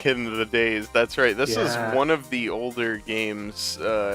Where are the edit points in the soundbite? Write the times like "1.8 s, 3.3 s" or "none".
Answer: 1.7 s